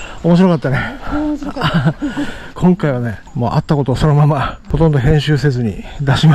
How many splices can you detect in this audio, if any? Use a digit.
1